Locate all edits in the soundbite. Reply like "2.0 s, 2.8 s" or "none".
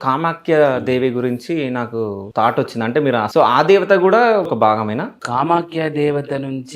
2.2 s, 3.3 s, 4.8 s

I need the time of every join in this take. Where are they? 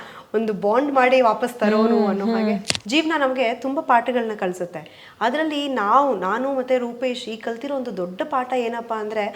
2.6 s

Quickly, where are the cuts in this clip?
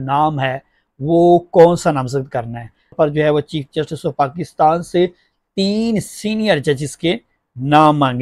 2.9 s

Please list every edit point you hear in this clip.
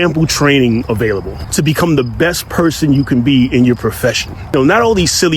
1.4 s, 4.5 s

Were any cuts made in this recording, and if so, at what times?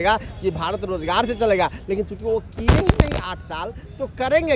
none

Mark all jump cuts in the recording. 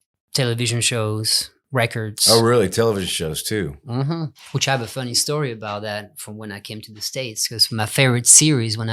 4.4 s

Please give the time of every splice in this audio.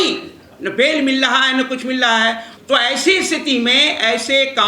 2.5 s

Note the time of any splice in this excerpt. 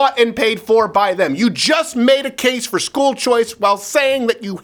none

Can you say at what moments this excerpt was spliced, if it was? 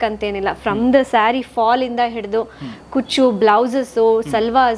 none

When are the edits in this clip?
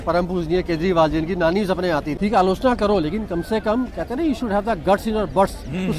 2.1 s

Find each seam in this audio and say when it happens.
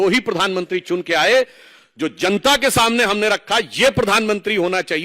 none

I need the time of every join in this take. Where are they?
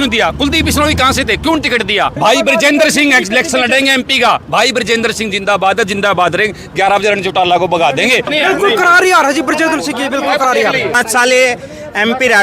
2.1 s, 8.3 s, 11.0 s

